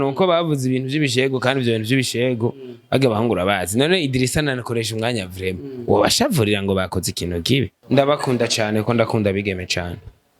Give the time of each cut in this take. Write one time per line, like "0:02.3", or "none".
0:07.7

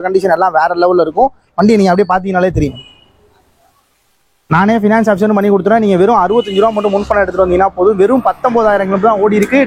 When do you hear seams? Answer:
none

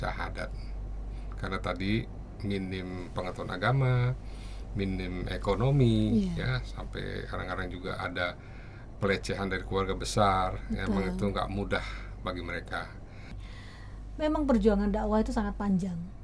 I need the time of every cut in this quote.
0:13.4

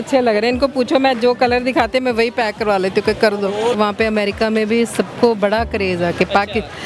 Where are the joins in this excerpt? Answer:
0:03.8

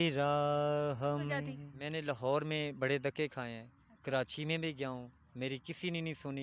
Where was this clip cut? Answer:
0:01.6

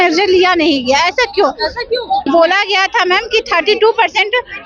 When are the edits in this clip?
0:02.2

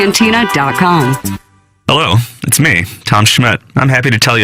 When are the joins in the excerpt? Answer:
0:01.7

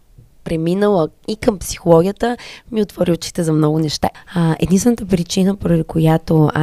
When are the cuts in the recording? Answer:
0:04.2

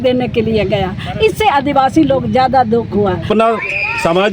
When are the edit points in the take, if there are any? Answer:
0:03.3

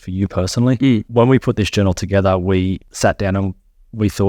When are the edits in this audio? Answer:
0:01.1
0:02.9

